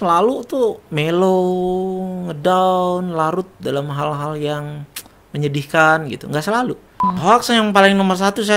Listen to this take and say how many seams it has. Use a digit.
1